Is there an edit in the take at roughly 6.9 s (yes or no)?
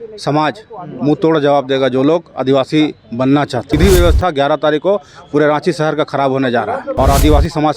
yes